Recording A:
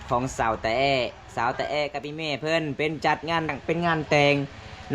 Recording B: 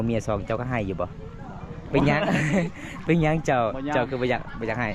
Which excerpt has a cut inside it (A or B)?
A